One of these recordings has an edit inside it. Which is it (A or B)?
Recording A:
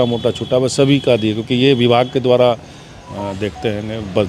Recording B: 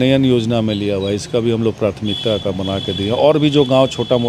A